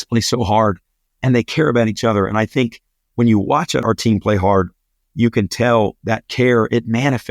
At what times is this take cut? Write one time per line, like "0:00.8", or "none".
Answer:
0:03.8

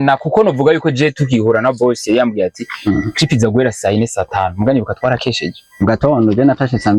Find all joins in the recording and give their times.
none

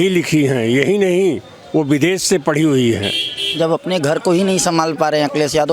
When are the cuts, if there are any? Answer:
0:03.3

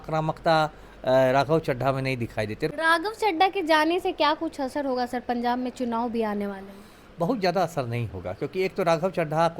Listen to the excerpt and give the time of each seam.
0:02.7

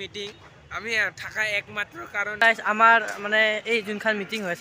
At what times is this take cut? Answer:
0:02.4

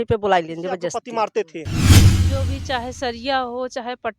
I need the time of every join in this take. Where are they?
0:00.9

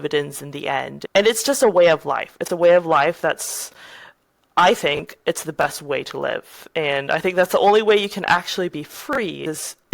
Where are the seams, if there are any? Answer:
0:00.9

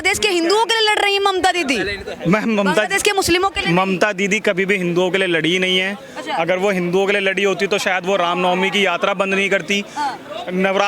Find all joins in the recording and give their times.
none

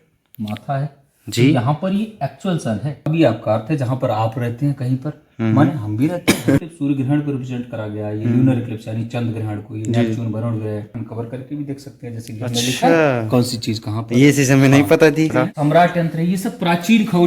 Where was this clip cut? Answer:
0:03.0
0:06.6
0:11.0
0:15.3

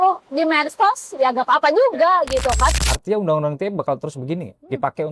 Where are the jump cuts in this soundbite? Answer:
0:02.8

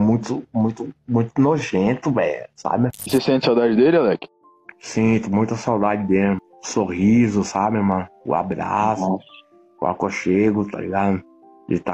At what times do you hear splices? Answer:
0:03.1

